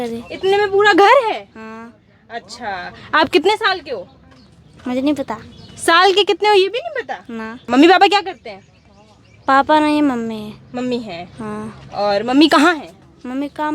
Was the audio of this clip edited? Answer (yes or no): yes